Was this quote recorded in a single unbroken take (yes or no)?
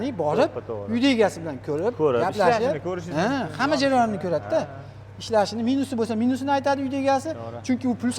yes